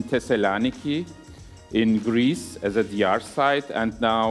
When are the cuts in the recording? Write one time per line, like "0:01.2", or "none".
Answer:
none